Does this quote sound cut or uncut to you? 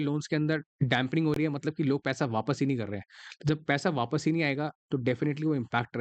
uncut